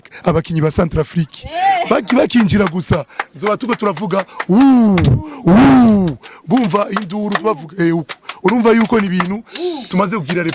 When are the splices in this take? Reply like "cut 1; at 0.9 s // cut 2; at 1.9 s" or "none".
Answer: none